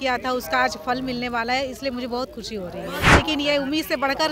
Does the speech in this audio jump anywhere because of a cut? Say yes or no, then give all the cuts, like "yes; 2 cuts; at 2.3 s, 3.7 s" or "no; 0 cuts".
yes; 1 cut; at 3.1 s